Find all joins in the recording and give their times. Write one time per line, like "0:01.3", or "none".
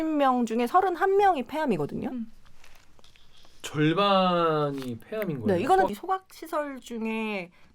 0:05.9